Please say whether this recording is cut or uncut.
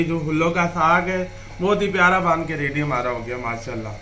uncut